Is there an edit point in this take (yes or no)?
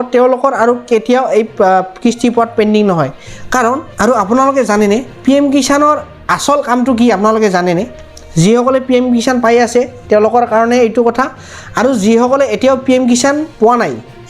yes